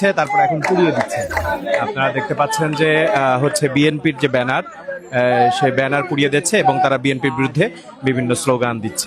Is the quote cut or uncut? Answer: uncut